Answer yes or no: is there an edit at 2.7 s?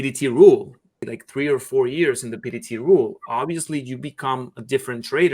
no